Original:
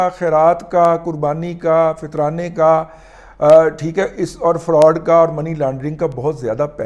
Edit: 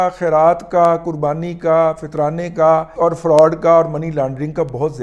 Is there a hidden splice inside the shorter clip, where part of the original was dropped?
yes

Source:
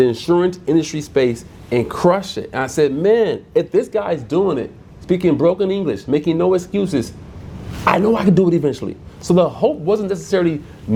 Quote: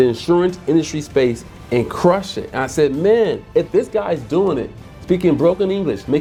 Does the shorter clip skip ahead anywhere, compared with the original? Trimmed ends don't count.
no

